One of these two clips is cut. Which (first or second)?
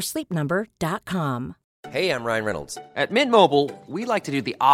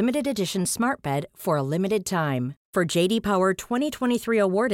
first